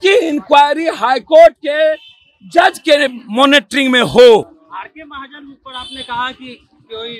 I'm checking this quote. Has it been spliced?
no; 0 cuts

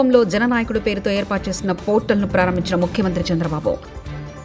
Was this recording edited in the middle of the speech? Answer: no; 0 cuts

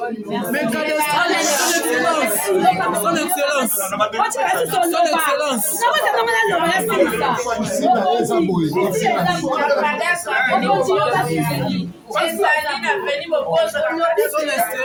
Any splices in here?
no; 0 cuts

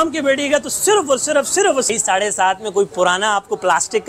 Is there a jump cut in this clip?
yes; 1 cut; at 1.9 s

